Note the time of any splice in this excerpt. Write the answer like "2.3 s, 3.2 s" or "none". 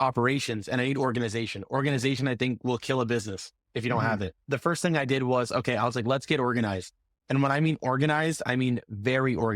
4.4 s